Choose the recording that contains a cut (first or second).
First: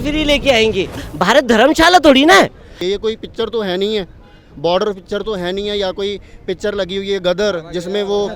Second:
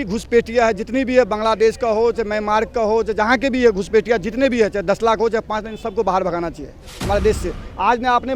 first